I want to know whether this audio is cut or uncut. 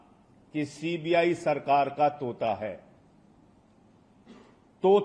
uncut